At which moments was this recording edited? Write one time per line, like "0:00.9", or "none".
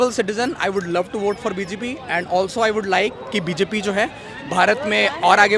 none